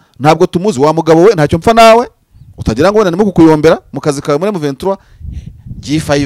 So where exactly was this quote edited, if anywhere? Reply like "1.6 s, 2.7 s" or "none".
none